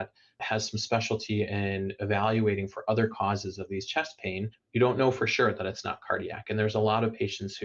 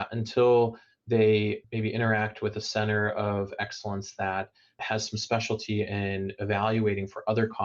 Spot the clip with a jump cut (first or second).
first